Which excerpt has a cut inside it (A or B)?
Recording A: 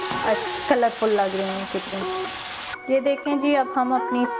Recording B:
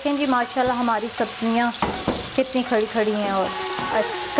A